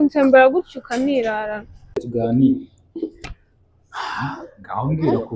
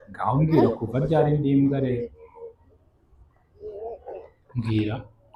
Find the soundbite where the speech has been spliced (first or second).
first